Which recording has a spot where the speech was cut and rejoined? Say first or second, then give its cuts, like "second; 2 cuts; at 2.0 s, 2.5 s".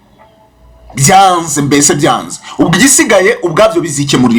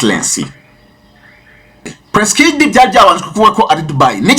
second; 1 cut; at 1.9 s